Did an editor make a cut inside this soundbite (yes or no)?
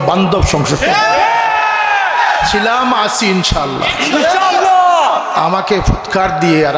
no